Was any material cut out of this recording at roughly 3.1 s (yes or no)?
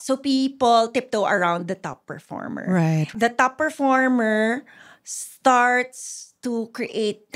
yes